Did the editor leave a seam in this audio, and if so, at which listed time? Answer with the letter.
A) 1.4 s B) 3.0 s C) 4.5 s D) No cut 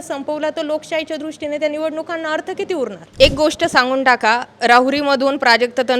B